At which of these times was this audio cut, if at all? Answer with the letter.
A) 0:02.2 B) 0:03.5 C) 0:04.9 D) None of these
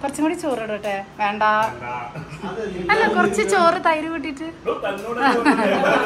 D